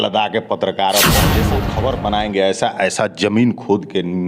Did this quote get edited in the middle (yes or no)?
yes